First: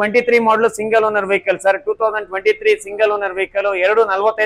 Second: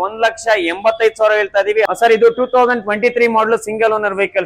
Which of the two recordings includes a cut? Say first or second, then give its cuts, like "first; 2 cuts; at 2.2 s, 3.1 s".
second; 1 cut; at 1.9 s